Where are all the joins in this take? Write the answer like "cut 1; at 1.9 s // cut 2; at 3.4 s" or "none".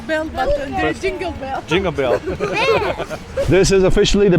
cut 1; at 3.4 s